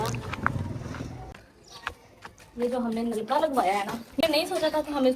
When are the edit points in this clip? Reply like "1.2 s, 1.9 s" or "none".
1.4 s, 4.2 s